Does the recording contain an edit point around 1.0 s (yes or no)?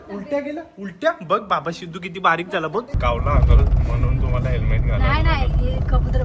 no